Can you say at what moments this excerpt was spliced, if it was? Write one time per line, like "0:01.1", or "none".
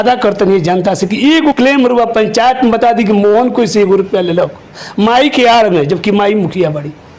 0:01.6